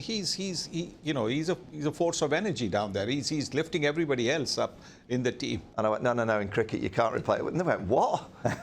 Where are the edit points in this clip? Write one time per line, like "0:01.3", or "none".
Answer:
0:05.6